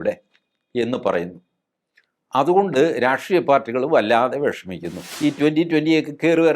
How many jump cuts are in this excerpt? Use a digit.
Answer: 1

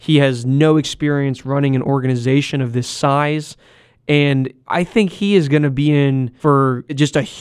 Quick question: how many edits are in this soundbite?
2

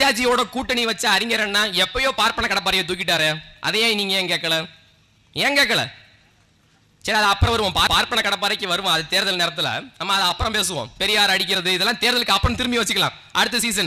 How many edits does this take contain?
0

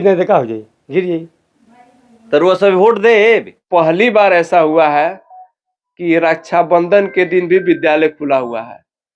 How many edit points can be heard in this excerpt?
1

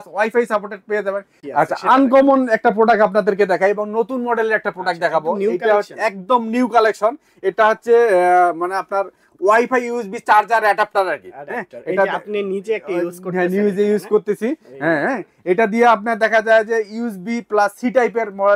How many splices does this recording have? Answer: 1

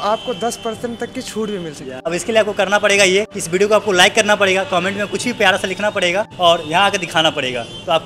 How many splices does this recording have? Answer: 3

